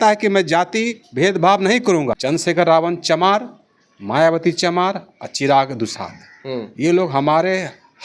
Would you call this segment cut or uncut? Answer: cut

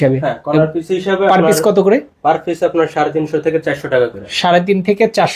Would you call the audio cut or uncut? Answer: uncut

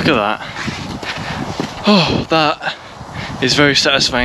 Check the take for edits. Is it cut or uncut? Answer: uncut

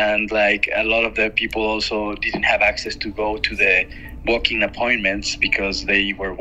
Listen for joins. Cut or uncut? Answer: uncut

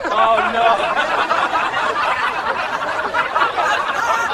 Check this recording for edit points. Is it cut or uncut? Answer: uncut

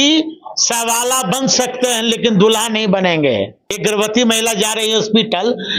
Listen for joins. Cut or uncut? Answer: cut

